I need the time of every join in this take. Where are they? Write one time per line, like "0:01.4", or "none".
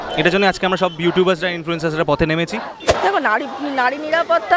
0:03.0